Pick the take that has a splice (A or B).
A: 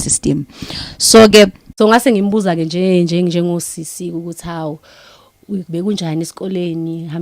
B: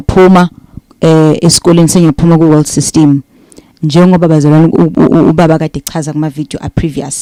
A